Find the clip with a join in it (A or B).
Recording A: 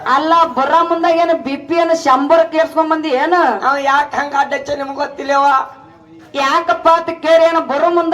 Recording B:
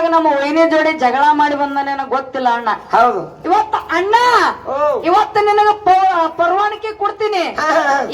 B